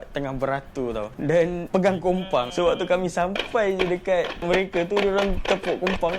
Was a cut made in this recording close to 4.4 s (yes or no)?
yes